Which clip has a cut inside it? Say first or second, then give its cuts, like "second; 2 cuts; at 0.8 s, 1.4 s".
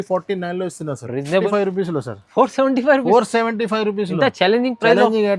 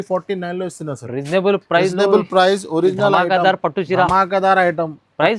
first; 1 cut; at 1.4 s